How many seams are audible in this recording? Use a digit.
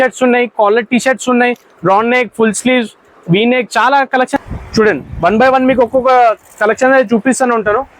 1